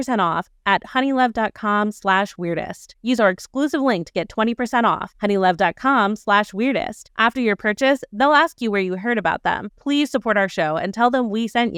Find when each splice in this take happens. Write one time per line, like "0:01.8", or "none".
none